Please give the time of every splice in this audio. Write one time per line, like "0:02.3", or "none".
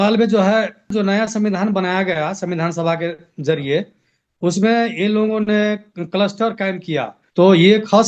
0:00.9
0:07.2

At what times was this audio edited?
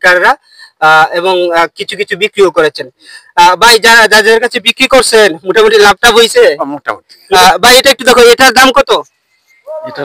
0:07.2

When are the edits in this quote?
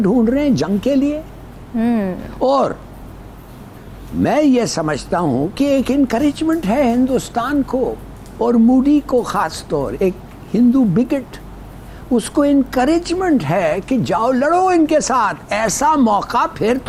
none

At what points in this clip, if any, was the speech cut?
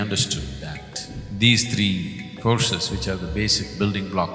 0:01.2

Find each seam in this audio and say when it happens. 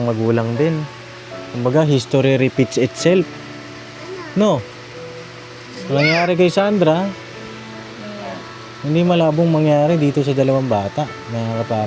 none

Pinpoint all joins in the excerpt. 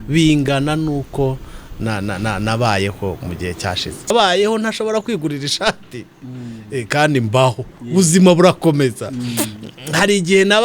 0:04.1

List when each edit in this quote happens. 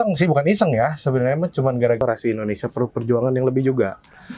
0:02.0

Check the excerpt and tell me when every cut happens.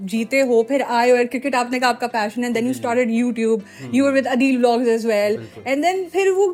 none

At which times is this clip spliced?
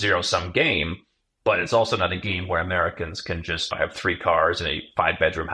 0:03.7

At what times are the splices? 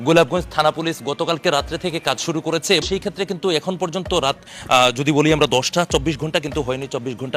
0:02.8

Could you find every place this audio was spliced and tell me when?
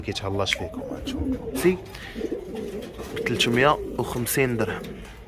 0:01.6

